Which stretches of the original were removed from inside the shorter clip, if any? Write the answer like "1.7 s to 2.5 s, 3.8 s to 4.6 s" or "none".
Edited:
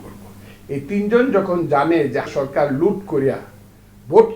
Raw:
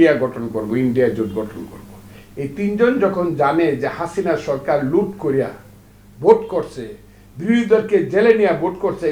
4.0 s to 4.4 s